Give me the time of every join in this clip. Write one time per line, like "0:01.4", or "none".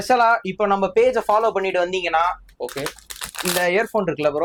none